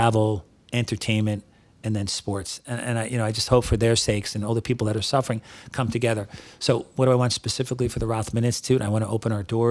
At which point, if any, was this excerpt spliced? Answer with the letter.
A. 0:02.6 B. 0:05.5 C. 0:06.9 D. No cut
D